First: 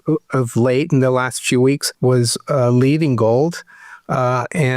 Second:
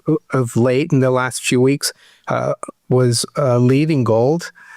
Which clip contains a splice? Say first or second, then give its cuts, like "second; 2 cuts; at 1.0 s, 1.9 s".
first; 1 cut; at 1.9 s